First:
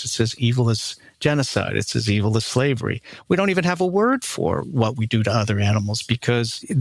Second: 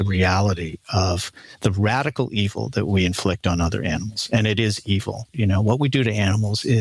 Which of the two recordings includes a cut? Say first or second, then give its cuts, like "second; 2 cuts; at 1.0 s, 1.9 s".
second; 1 cut; at 5.3 s